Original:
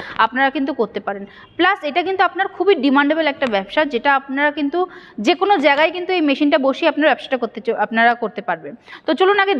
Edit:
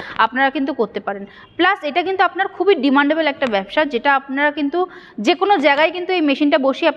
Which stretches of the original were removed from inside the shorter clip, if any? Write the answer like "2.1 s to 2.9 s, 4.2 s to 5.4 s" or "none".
none

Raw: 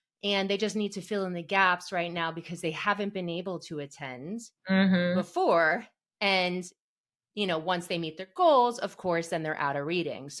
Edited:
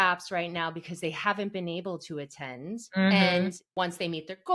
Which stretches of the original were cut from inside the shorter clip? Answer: 4.5 s to 4.6 s, 5.4 s to 7.5 s

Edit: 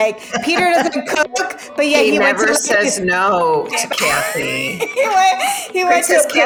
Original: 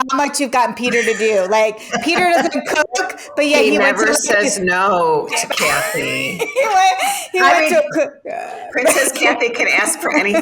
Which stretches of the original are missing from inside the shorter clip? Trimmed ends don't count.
none

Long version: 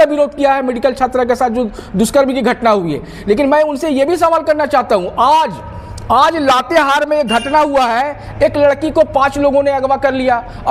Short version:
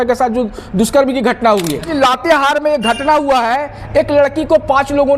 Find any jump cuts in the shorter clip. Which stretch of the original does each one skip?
3.1 s to 6.4 s

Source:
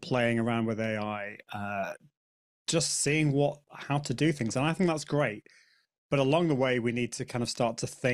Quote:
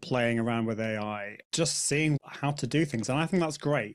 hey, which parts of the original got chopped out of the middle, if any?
1.4 s to 2.5 s, 3.3 s to 3.6 s

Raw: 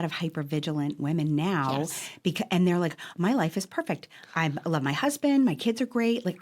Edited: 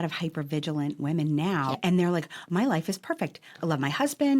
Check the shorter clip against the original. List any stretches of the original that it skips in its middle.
1.8 s to 2.4 s, 4.2 s to 4.6 s

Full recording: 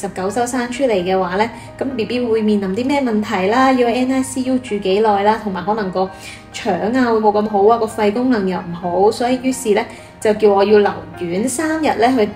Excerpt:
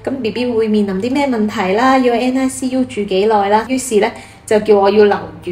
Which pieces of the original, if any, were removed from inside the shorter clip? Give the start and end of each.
5.4 s to 9.4 s

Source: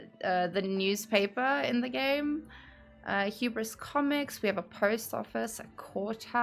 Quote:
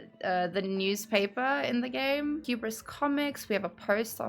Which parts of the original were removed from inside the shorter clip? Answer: 2.4 s to 3.4 s

